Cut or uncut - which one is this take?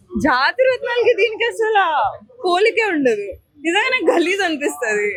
uncut